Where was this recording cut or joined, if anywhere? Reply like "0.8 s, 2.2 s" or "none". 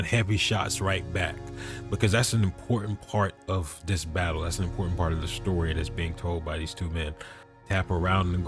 7.5 s